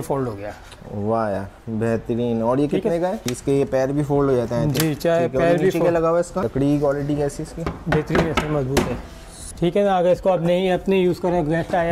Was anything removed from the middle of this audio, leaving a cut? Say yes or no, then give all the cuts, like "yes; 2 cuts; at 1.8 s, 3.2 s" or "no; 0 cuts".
yes; 3 cuts; at 3.3 s, 6.5 s, 9.4 s